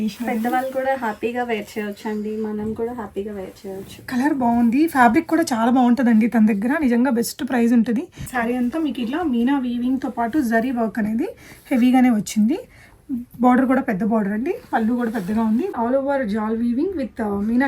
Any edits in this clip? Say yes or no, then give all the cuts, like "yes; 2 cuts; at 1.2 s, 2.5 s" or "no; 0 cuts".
yes; 2 cuts; at 8.2 s, 15.7 s